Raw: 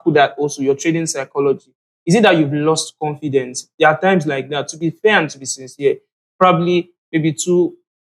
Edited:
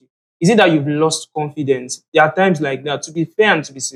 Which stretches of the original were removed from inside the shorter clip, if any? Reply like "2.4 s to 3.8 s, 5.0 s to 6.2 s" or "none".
none